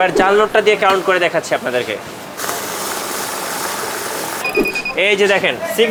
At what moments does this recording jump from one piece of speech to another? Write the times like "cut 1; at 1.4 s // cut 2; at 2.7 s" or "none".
none